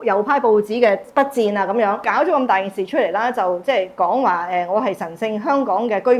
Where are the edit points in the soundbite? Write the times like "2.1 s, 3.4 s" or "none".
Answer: 1.1 s, 2.1 s